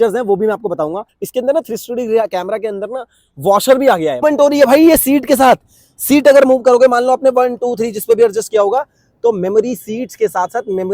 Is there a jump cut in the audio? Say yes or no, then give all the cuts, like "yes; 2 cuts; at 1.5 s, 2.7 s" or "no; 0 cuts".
yes; 2 cuts; at 1.1 s, 4.2 s